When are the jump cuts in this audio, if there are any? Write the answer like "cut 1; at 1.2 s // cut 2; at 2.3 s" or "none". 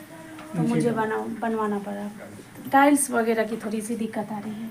cut 1; at 2.2 s

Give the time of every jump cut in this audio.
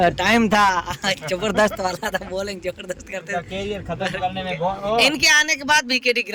none

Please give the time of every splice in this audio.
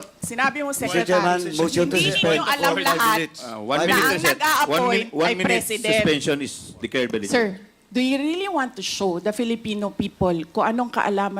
cut 1; at 7.2 s

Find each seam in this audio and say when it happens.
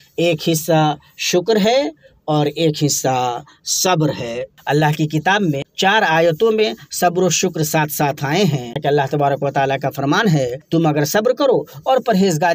cut 1; at 4.5 s // cut 2; at 5.7 s // cut 3; at 8.8 s // cut 4; at 10.6 s

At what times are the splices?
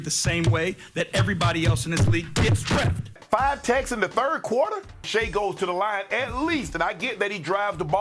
cut 1; at 3.0 s

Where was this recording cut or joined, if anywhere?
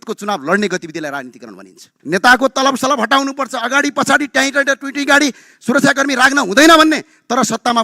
cut 1; at 1.9 s

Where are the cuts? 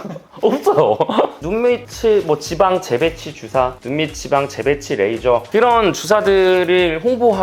cut 1; at 1.4 s // cut 2; at 5.5 s

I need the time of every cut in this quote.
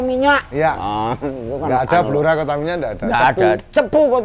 none

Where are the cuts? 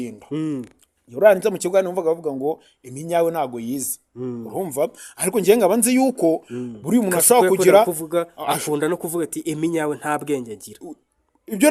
none

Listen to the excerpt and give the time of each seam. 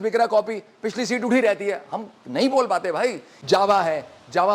cut 1; at 3.3 s

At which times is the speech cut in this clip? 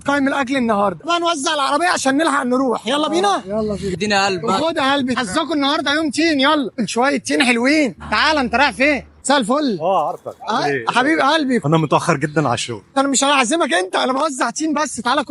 none

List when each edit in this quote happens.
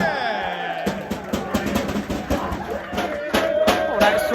cut 1; at 3.0 s

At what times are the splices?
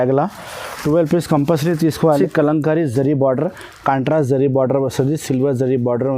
cut 1; at 2.1 s

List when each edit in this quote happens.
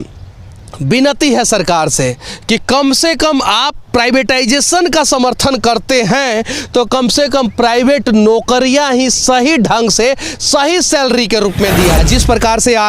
cut 1; at 12.0 s

